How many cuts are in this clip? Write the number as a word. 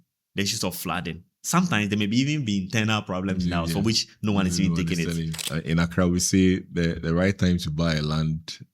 one